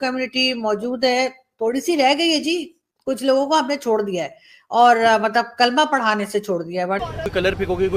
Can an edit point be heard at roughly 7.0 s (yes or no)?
yes